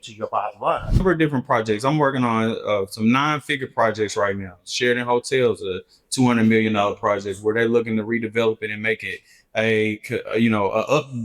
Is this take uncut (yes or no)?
no